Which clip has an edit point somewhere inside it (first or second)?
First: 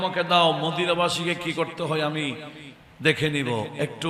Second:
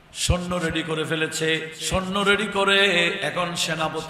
second